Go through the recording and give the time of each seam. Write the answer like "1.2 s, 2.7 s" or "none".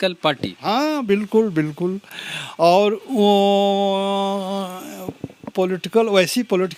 none